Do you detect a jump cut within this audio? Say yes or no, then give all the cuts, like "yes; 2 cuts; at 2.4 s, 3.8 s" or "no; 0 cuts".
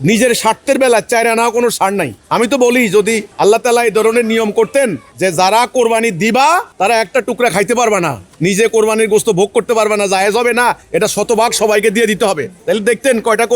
yes; 7 cuts; at 2.2 s, 3.3 s, 5.1 s, 6.7 s, 8.2 s, 10.8 s, 12.5 s